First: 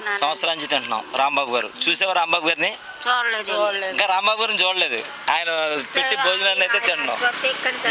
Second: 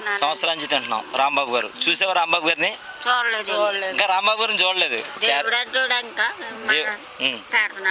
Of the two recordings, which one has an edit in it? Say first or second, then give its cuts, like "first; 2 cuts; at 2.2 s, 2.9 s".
second; 1 cut; at 5.1 s